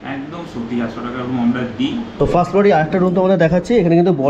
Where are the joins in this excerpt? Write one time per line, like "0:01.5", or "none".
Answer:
0:02.2